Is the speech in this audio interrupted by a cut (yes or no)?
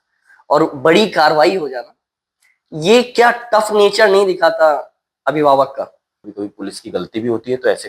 yes